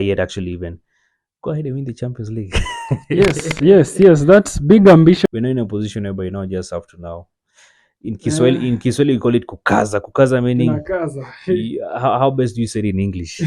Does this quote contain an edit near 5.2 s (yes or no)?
yes